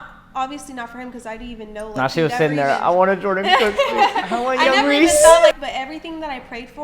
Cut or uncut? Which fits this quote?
cut